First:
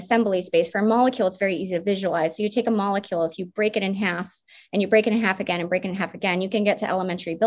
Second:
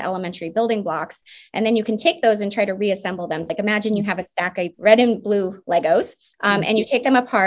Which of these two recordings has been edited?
second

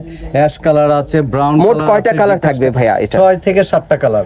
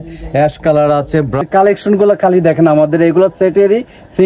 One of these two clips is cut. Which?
second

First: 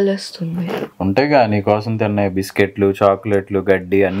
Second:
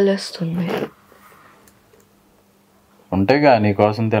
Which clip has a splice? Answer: first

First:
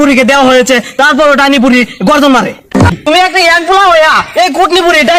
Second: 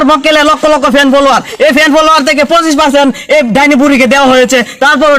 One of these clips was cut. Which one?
first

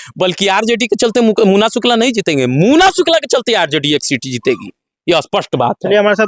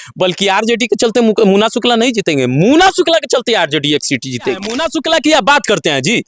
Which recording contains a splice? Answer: second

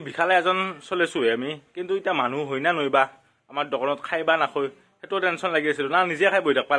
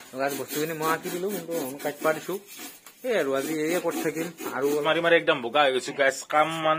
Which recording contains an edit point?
second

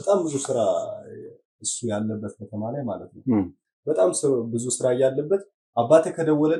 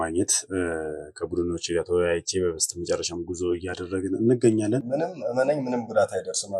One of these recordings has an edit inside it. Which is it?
second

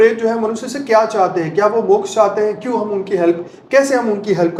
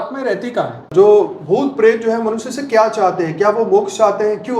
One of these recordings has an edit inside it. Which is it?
second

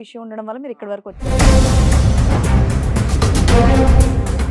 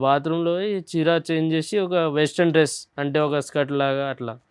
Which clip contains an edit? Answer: first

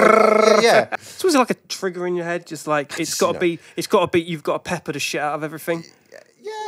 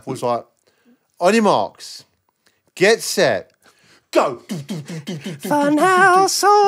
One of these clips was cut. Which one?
first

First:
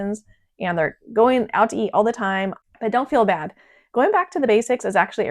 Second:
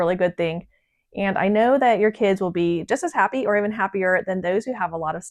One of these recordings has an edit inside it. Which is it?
first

